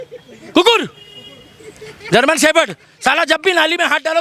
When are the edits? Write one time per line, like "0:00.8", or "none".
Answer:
none